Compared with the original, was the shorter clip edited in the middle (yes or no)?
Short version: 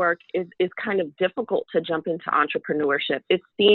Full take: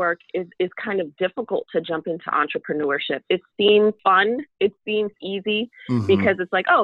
no